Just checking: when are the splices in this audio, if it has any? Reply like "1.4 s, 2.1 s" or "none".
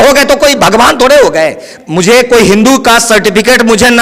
1.7 s